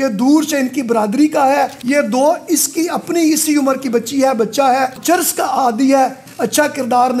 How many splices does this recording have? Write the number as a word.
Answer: three